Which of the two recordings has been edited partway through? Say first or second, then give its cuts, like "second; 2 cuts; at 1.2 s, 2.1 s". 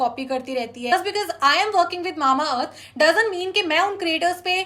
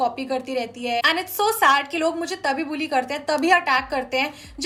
first; 1 cut; at 0.9 s